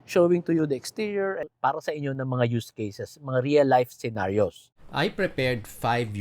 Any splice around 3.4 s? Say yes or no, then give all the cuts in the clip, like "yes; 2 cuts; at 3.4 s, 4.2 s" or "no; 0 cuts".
no; 1 cut; at 1.4 s